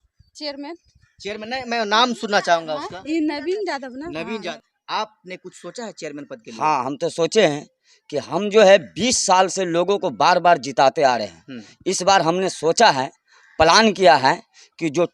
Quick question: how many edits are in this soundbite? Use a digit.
1